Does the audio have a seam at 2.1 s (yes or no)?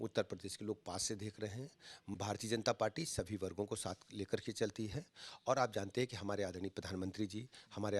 yes